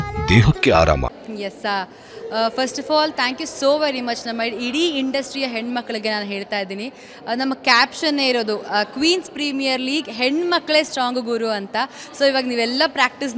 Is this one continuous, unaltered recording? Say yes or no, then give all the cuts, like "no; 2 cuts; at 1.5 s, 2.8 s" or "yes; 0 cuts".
no; 1 cut; at 1.1 s